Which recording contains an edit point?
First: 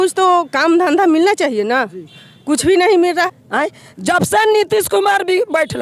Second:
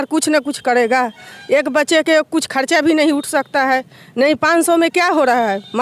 first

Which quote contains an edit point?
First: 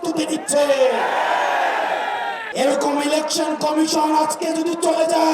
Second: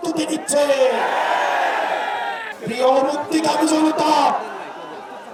first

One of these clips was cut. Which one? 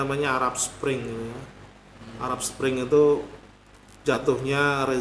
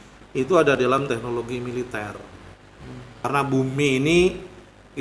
second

